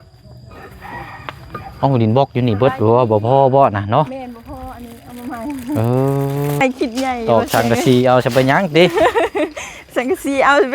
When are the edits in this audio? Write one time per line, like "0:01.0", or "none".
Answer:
0:06.6